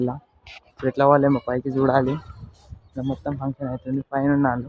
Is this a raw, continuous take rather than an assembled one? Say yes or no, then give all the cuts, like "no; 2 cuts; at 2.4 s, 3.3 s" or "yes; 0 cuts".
yes; 0 cuts